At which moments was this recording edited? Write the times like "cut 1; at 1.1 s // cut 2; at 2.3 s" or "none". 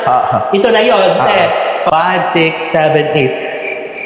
cut 1; at 1.9 s